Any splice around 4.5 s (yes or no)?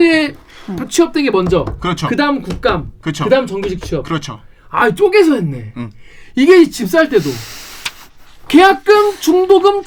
no